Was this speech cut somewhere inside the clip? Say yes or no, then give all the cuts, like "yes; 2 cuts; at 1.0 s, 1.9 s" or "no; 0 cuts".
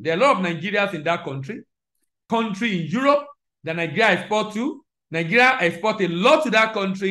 yes; 1 cut; at 2.2 s